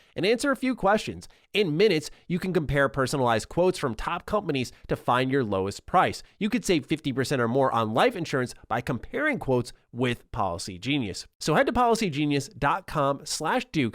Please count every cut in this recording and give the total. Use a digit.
1